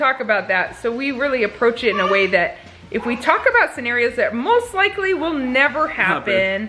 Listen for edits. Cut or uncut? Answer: uncut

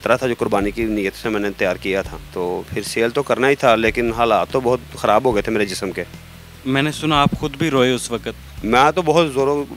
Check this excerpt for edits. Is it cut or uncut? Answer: uncut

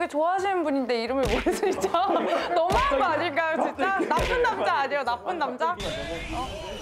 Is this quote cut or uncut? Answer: uncut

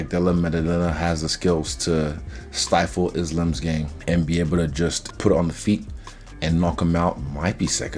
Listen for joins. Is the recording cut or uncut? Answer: uncut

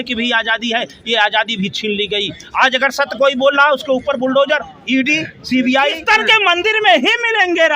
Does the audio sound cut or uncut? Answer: cut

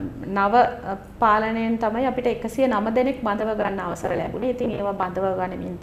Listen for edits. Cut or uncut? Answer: uncut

